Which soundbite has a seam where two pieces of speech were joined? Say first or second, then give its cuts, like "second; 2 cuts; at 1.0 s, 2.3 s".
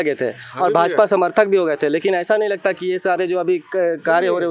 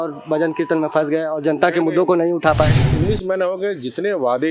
second; 1 cut; at 2.8 s